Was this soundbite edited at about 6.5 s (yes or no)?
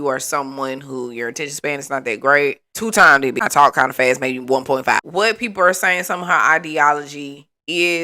no